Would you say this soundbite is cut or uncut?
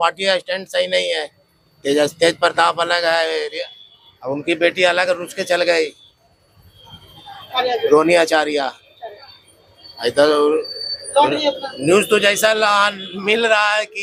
uncut